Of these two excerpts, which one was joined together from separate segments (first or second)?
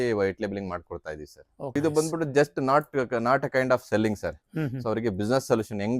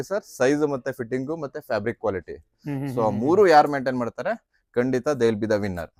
first